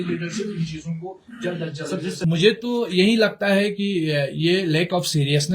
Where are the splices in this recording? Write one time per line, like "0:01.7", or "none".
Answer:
0:02.1